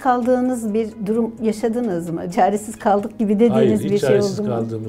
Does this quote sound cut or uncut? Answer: cut